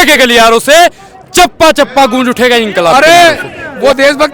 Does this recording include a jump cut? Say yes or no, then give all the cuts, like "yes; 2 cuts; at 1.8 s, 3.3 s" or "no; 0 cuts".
yes; 1 cut; at 2.9 s